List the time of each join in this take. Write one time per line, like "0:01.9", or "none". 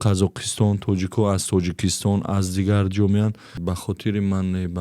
0:03.6